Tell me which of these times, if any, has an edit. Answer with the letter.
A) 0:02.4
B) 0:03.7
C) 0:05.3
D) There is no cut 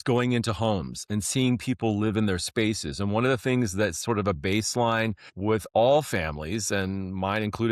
C